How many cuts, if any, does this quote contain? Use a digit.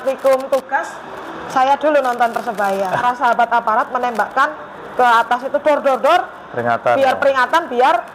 1